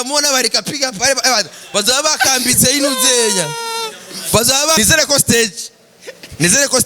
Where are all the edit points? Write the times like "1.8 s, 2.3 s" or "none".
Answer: 4.8 s